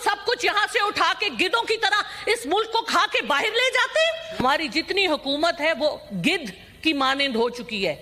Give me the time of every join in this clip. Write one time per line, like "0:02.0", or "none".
0:04.3